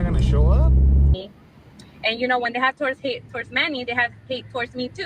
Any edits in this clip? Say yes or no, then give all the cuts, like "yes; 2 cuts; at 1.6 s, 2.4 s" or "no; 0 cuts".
yes; 1 cut; at 1.1 s